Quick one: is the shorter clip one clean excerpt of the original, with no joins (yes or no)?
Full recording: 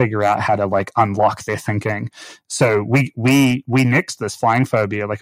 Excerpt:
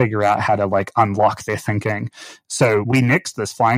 no